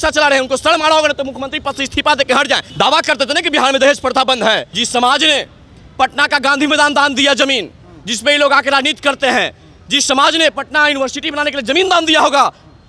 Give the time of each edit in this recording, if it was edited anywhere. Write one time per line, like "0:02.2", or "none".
0:02.7
0:04.7